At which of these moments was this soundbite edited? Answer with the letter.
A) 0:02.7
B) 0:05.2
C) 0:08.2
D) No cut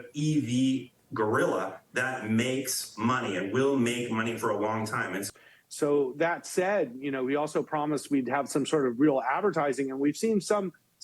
B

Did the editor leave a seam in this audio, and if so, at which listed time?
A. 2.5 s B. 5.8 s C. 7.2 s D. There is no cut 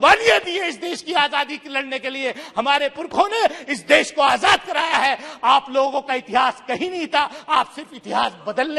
D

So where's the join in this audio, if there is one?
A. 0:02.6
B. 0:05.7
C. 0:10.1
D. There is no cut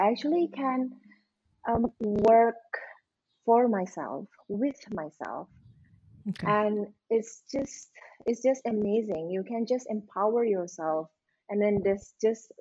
D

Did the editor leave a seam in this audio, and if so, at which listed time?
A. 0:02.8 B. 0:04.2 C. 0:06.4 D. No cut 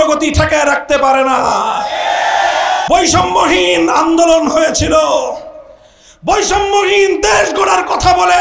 A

